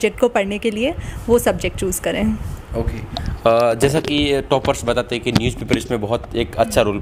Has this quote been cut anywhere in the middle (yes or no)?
no